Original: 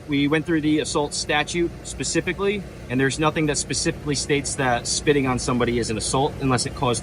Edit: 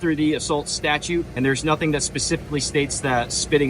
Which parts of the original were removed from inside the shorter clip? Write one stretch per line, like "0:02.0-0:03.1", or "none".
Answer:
0:01.8-0:02.9